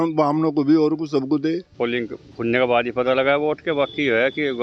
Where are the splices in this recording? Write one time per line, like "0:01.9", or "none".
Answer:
0:01.7